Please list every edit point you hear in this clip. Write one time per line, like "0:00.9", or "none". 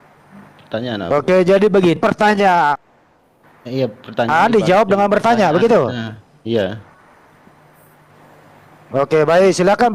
none